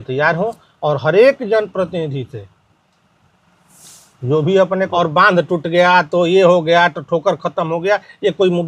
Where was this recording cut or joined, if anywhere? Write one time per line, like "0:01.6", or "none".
0:04.9